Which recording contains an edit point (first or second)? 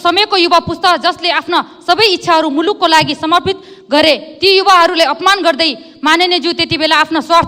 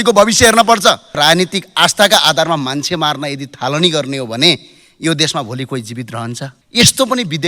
second